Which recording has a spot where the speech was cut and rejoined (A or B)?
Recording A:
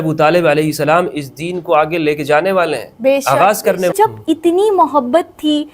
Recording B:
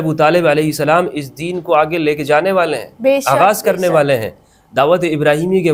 A